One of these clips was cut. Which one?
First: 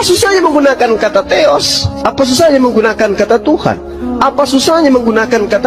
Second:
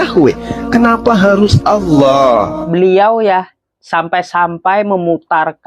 second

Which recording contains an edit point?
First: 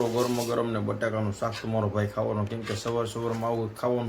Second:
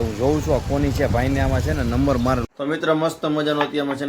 second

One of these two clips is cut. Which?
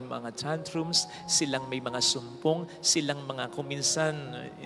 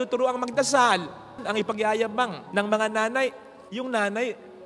second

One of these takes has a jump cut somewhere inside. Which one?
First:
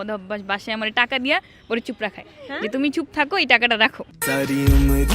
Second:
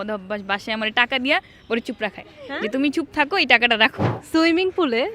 second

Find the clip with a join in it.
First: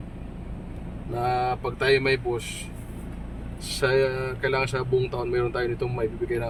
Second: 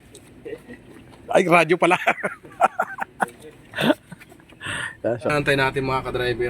second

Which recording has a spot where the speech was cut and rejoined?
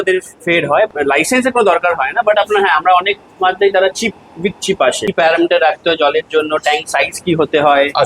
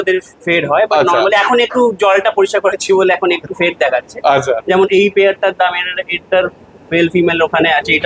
first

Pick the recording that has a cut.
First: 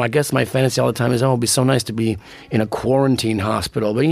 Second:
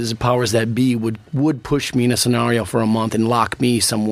first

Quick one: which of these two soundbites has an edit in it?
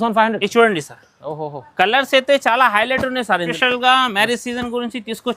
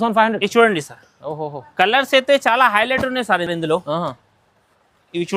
first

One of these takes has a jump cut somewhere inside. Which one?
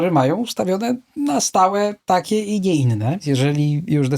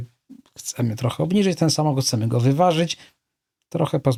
first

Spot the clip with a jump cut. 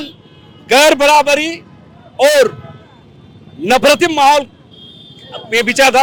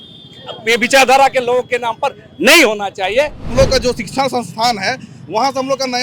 second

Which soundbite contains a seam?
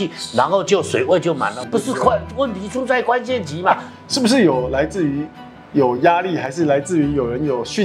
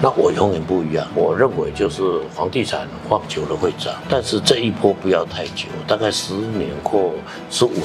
first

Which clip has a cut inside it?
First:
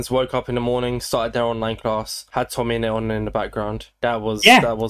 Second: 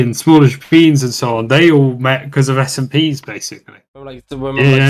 second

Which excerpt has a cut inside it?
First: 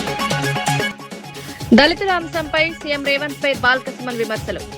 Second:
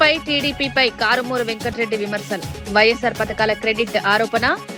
first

